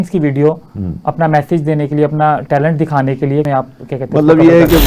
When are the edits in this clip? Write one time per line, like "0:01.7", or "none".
0:03.5